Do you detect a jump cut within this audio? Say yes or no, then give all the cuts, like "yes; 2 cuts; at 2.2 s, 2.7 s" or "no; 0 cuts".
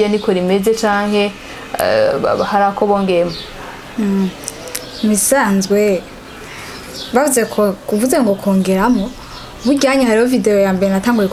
no; 0 cuts